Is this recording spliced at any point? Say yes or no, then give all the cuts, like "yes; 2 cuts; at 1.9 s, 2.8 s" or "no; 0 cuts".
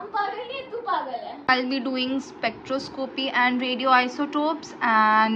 yes; 1 cut; at 1.5 s